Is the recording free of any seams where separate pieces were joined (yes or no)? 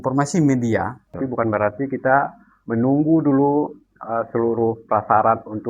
no